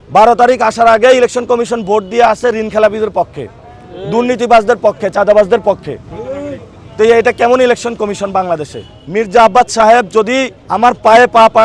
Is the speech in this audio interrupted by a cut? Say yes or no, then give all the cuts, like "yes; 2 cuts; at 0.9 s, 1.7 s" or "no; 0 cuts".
no; 0 cuts